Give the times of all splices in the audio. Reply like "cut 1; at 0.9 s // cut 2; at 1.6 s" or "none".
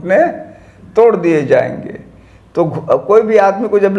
none